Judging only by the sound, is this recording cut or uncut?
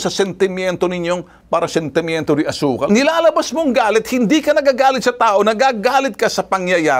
cut